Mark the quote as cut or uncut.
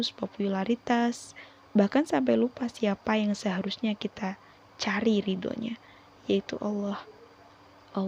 uncut